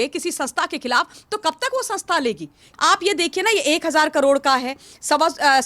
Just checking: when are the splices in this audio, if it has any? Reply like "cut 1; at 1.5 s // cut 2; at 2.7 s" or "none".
cut 1; at 2.7 s